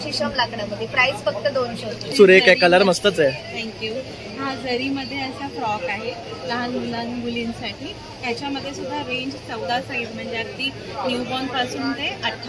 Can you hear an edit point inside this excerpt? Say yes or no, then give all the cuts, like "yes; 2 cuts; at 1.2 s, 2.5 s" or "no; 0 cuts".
yes; 1 cut; at 2.1 s